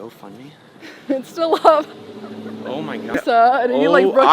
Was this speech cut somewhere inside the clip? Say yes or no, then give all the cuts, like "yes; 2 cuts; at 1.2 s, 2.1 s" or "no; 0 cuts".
yes; 1 cut; at 3.1 s